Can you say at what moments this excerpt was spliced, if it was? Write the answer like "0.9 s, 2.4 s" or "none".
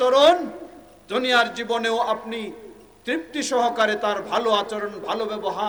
none

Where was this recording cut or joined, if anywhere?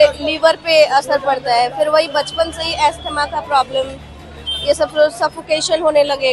none

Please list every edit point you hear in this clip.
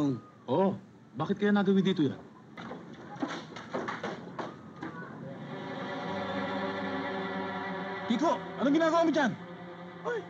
2.5 s, 5.7 s

